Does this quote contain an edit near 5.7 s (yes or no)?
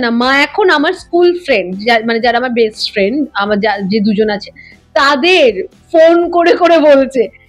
no